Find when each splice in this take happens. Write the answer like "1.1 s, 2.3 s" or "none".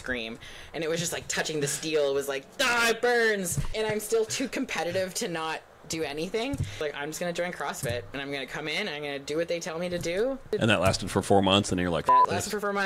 3.6 s, 6.8 s, 10.5 s